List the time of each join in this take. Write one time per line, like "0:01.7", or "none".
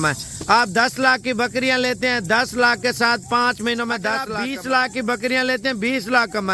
0:04.3